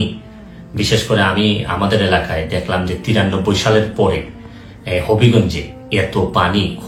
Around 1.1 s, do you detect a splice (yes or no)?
no